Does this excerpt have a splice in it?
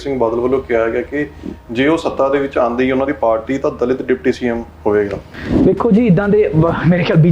yes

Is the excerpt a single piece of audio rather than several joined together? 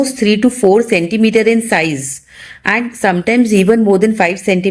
yes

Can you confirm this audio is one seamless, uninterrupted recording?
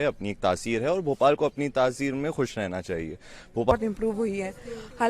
no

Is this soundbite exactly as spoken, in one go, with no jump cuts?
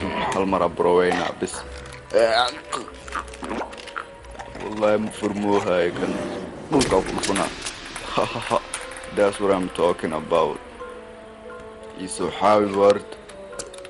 yes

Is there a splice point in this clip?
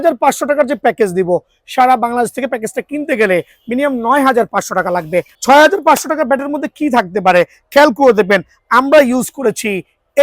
yes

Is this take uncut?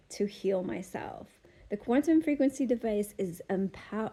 yes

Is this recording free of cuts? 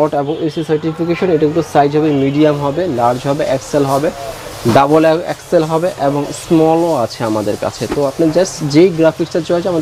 yes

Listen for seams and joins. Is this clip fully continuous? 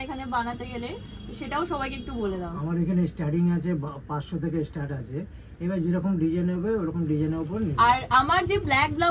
no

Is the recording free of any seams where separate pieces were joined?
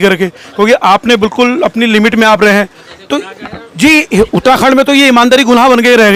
yes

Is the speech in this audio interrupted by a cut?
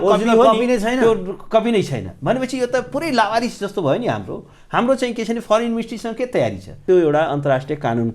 yes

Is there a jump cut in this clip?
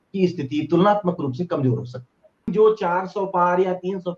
yes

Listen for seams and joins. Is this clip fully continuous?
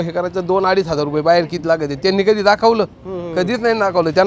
yes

